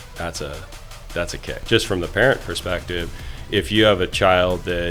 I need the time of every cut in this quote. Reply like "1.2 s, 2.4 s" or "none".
1.5 s

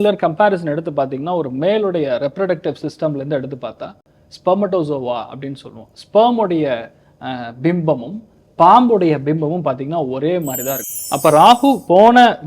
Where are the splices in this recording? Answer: 10.9 s

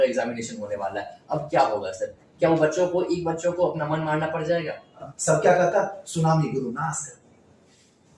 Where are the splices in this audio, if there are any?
5.1 s

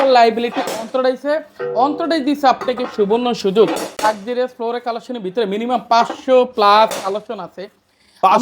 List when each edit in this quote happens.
4.0 s

